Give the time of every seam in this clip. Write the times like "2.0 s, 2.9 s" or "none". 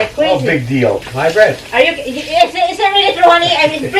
1.1 s